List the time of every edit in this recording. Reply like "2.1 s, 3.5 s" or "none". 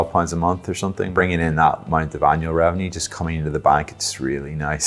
1.0 s